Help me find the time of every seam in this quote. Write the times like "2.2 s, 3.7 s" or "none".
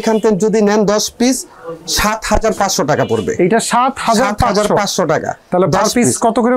none